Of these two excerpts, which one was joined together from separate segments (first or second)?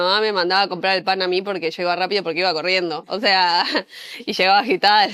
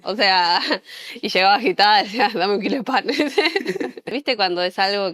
second